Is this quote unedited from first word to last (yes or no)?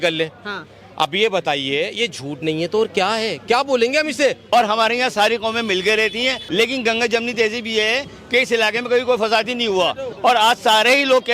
no